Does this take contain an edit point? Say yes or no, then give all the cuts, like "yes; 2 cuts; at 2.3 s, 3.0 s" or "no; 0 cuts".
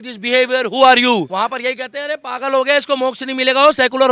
no; 0 cuts